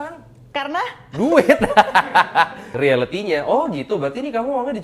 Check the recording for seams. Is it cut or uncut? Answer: cut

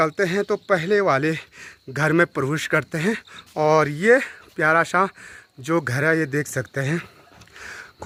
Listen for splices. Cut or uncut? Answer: uncut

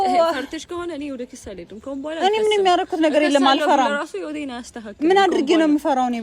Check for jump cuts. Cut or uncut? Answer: uncut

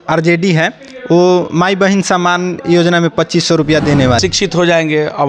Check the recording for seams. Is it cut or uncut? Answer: cut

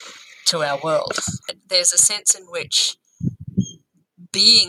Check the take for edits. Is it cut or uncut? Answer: cut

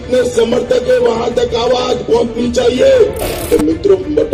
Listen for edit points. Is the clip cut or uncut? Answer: uncut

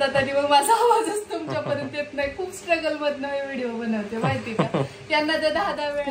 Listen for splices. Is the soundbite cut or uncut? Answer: uncut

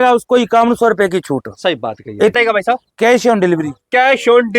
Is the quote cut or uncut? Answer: cut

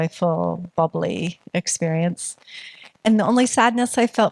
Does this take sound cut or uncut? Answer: uncut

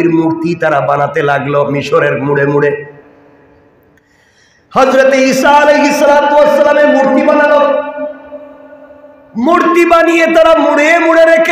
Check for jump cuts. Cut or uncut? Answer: uncut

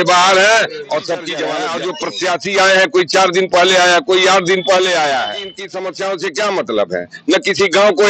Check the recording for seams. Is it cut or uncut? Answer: cut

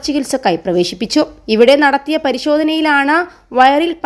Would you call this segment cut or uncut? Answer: cut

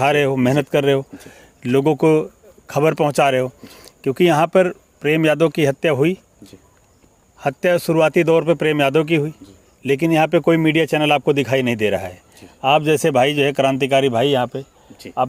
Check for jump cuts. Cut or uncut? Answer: uncut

